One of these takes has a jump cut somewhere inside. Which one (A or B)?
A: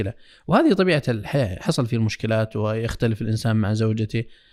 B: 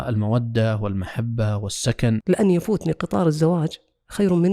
B